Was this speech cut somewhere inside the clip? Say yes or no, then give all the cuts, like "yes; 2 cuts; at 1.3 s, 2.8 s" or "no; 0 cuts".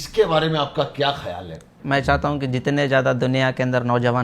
yes; 1 cut; at 1.7 s